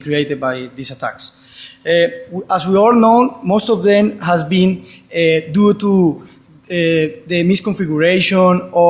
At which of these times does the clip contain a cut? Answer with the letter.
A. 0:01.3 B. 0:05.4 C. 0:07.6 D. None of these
A